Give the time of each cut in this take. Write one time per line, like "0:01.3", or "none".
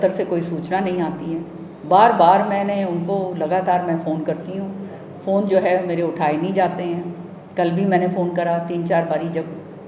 none